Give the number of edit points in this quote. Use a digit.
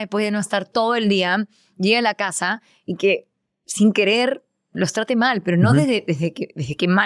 0